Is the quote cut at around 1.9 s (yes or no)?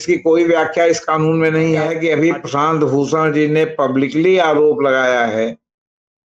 yes